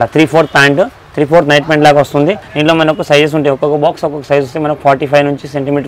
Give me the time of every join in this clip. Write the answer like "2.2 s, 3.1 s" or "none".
2.5 s

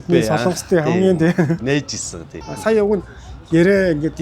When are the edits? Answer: 2.2 s

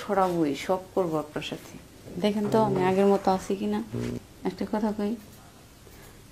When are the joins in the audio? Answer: 4.3 s

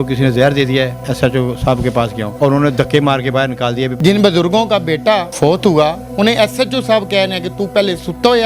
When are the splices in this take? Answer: 1.0 s, 2.2 s, 3.9 s, 5.3 s

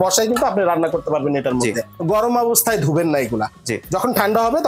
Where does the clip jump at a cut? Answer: 1.9 s

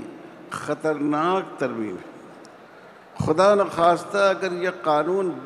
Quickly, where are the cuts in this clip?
none

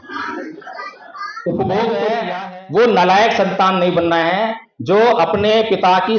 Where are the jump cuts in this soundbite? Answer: 2.3 s

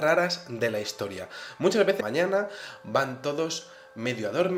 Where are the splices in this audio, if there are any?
none

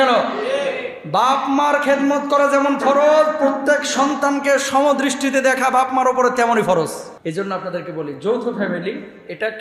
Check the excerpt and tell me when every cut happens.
7.1 s

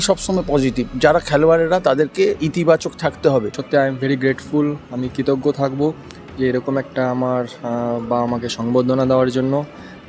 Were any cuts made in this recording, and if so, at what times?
3.6 s

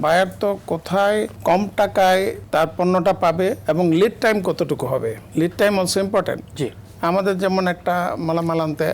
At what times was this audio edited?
1.3 s, 2.4 s, 3.6 s, 5.2 s

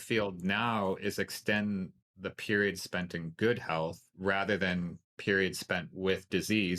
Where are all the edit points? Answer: 4.1 s

